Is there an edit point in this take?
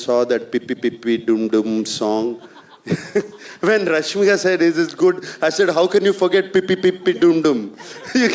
no; 0 cuts

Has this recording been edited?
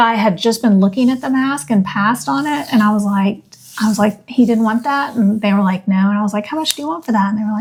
no; 0 cuts

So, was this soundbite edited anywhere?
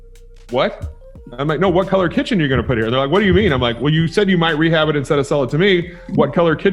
no; 0 cuts

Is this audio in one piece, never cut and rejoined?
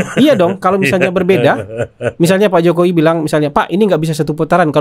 yes; 0 cuts

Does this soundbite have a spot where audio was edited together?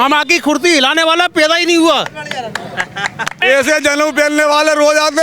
yes; 1 cut; at 3.4 s

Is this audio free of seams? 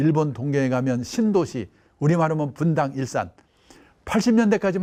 yes; 0 cuts

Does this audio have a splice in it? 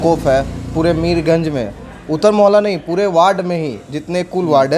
no; 0 cuts

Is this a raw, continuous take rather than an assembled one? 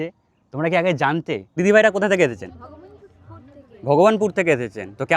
no; 1 cut; at 1.6 s

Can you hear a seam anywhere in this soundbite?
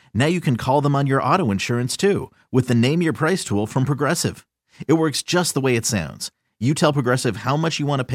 no; 0 cuts

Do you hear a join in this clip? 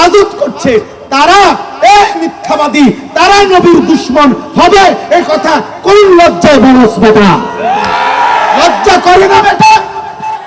no; 0 cuts

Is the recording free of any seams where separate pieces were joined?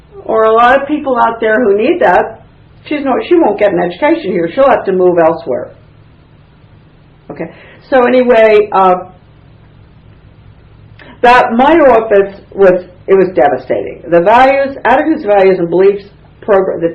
no; 1 cut; at 8.0 s

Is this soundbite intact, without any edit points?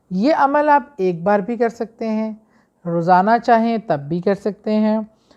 yes; 0 cuts

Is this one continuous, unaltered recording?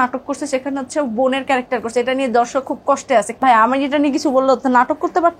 no; 1 cut; at 3.4 s

